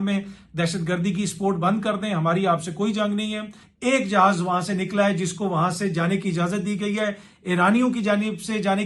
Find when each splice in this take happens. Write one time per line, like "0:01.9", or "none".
0:03.6